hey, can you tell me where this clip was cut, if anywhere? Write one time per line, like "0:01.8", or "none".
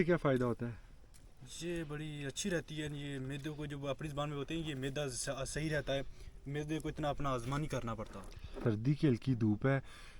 0:08.5